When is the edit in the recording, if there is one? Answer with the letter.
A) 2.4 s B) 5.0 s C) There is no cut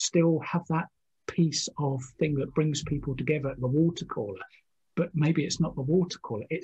C